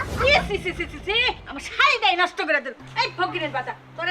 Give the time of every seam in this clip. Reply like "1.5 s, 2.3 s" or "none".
none